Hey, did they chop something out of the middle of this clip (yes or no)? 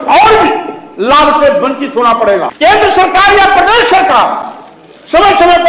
yes